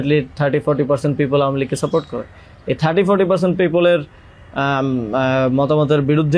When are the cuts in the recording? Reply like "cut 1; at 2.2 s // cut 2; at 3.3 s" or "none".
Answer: none